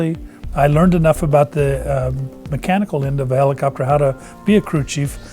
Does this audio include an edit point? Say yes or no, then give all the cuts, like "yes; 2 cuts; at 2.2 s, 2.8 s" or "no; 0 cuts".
no; 0 cuts